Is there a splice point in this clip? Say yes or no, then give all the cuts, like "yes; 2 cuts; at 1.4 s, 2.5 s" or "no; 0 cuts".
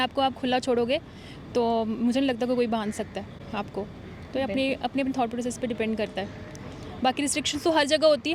no; 0 cuts